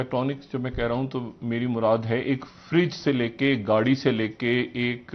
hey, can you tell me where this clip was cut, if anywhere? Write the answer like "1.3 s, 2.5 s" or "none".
none

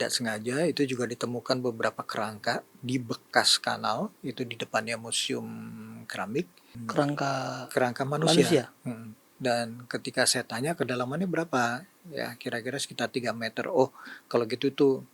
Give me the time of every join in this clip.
none

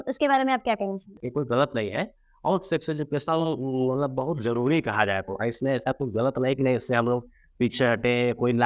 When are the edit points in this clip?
1.3 s

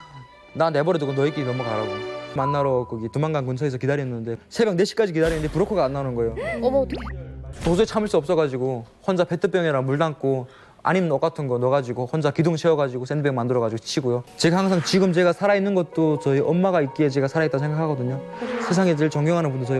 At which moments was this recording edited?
2.4 s, 7.5 s, 14.3 s

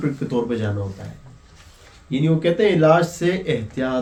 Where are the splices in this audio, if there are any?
none

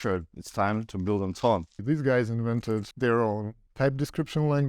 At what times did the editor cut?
1.8 s, 2.9 s, 3.6 s

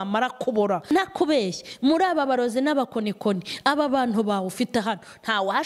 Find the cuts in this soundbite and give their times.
0.9 s

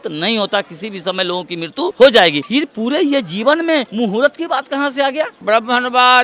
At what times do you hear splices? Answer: 1.9 s, 2.4 s, 3.9 s, 5.4 s

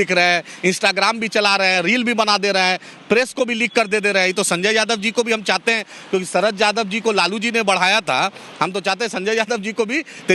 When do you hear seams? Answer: none

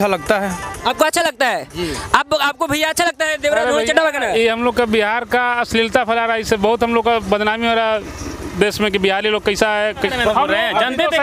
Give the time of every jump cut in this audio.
10.1 s

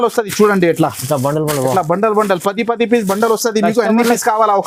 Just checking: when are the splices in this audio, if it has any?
none

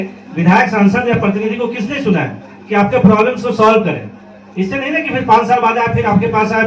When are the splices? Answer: none

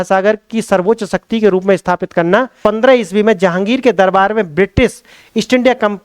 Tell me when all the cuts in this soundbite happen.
2.6 s

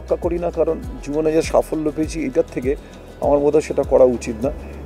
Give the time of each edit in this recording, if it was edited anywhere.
none

